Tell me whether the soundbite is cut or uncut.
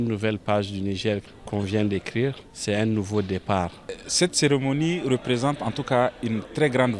cut